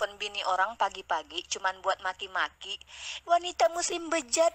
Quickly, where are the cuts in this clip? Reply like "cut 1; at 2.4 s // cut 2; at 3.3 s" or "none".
none